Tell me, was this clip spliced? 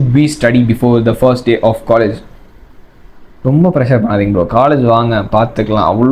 no; 0 cuts

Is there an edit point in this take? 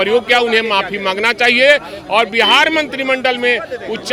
no; 0 cuts

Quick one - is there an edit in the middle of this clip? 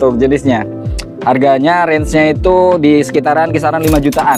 no; 0 cuts

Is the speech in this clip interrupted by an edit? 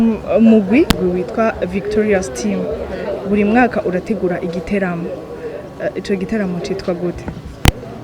yes; 1 cut; at 1.0 s

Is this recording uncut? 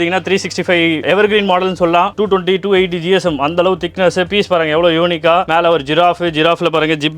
no; 1 cut; at 2.1 s

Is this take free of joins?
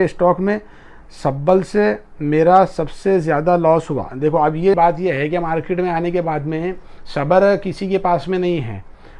no; 1 cut; at 4.8 s

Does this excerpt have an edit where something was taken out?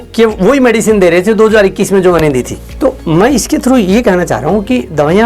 no; 0 cuts

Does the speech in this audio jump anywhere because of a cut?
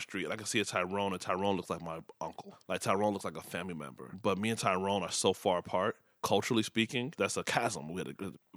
no; 0 cuts

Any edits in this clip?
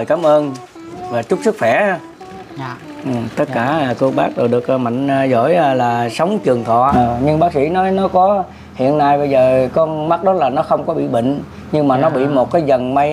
yes; 1 cut; at 6.9 s

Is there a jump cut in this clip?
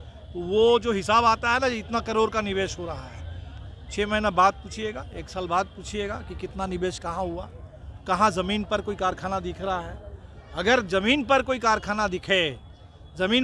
no; 0 cuts

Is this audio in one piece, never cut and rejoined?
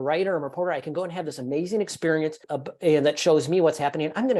yes; 0 cuts

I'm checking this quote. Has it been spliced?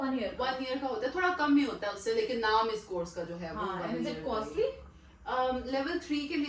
no; 0 cuts

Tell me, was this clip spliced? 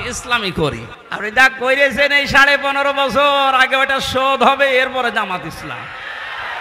yes; 1 cut; at 1.0 s

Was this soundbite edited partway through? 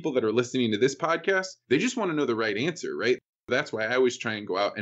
yes; 1 cut; at 3.5 s

